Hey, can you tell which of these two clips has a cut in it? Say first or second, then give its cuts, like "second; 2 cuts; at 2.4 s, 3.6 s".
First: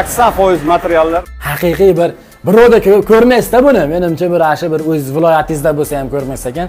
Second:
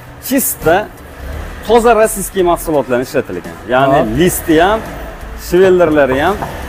first; 1 cut; at 1.2 s